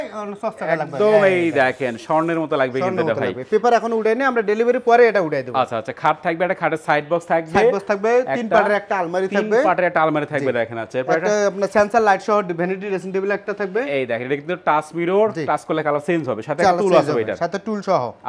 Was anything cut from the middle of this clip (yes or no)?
no